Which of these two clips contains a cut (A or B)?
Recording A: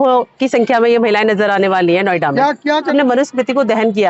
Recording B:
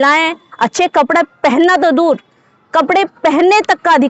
A